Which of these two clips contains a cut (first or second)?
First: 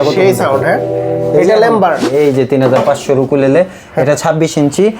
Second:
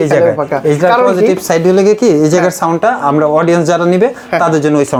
first